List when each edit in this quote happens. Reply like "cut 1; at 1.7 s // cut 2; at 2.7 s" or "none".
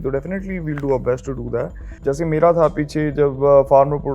cut 1; at 1.8 s